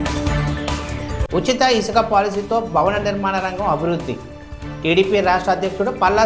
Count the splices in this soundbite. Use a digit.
1